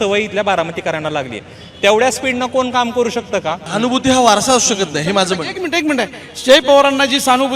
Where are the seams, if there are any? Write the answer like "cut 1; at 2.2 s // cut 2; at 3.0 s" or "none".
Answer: cut 1; at 3.6 s

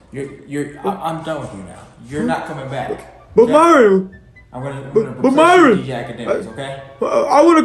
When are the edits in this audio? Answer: none

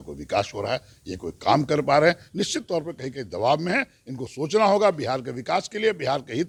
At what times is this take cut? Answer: none

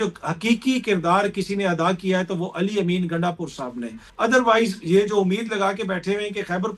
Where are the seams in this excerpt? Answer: cut 1; at 4.0 s

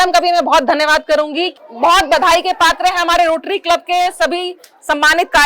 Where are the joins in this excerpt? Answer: cut 1; at 1.6 s

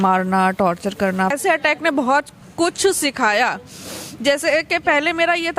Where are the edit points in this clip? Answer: cut 1; at 1.3 s

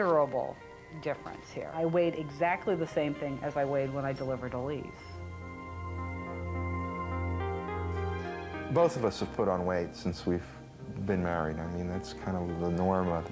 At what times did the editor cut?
cut 1; at 6.8 s

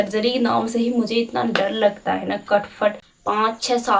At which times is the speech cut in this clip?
cut 1; at 3.1 s

